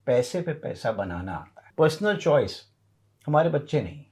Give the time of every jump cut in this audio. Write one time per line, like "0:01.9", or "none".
0:01.6